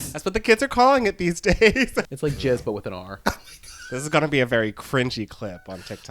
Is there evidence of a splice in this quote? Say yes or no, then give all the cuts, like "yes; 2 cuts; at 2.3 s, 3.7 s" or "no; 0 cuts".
yes; 1 cut; at 2.0 s